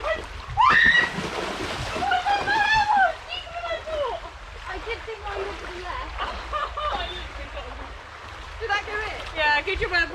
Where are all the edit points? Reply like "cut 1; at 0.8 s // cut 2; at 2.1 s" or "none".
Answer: cut 1; at 7.9 s

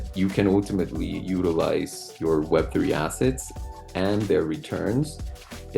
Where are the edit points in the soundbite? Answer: cut 1; at 2.1 s

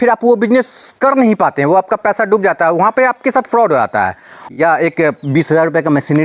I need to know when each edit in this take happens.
cut 1; at 4.4 s

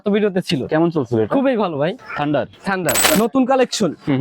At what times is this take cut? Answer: cut 1; at 2.0 s // cut 2; at 3.0 s

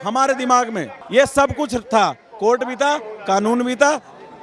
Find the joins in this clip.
cut 1; at 0.9 s

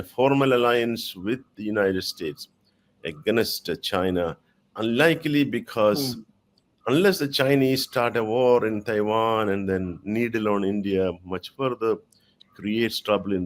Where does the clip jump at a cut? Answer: none

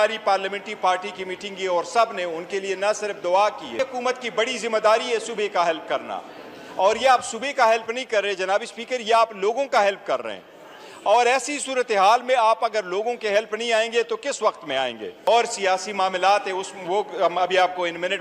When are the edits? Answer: cut 1; at 3.7 s // cut 2; at 15.3 s

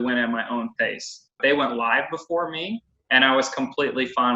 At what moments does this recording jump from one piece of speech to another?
cut 1; at 1.4 s

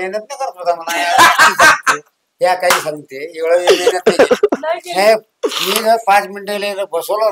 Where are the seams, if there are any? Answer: none

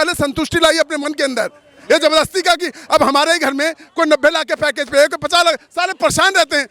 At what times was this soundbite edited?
none

